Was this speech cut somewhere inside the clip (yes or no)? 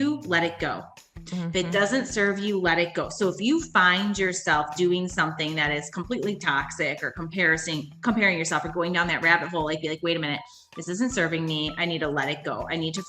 no